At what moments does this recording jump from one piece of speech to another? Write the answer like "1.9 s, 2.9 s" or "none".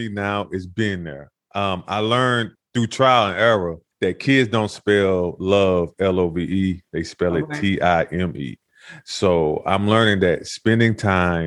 2.6 s, 3.8 s